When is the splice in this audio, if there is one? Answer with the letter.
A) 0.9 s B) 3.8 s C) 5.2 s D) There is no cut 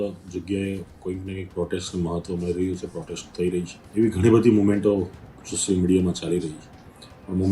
B